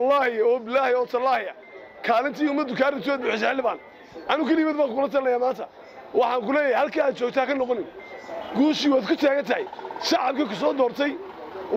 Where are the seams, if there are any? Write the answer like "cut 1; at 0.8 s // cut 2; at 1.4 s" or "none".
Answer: none